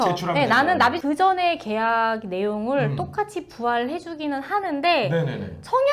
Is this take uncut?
no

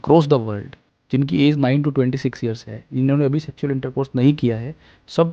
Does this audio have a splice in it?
no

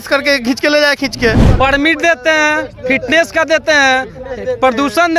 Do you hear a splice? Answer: yes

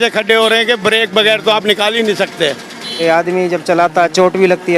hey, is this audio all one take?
no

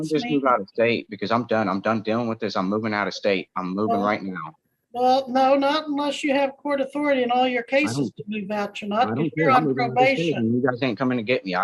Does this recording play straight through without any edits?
yes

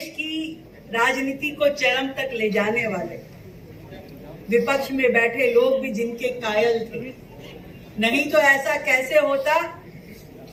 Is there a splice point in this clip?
no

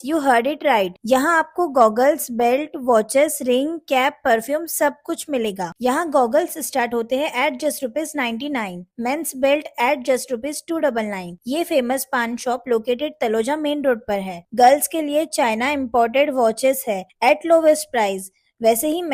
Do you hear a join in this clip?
no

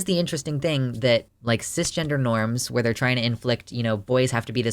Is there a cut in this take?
yes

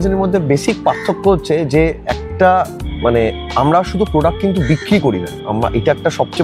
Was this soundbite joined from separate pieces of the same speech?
no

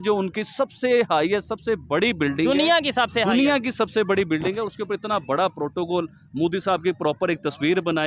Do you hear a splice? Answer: no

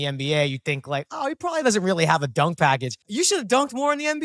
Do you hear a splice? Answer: yes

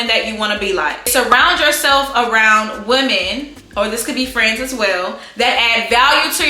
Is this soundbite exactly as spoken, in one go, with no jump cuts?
no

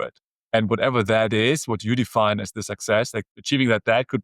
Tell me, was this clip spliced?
yes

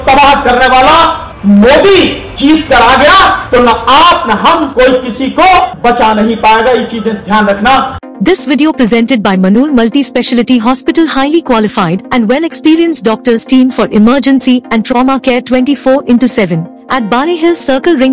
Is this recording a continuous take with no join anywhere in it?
no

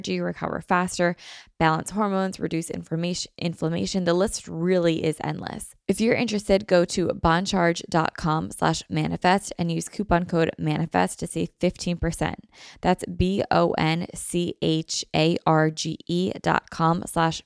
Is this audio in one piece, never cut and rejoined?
no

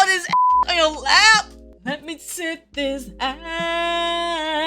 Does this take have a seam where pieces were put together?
yes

